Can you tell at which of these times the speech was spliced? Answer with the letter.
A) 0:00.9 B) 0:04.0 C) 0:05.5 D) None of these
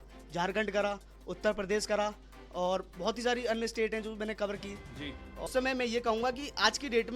C